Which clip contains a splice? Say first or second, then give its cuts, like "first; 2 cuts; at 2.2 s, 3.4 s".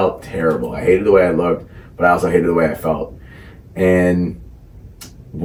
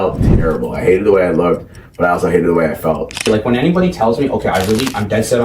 second; 1 cut; at 3.3 s